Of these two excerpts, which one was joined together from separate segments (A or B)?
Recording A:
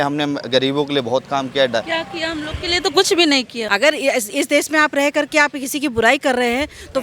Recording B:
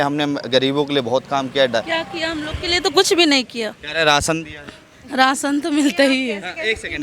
A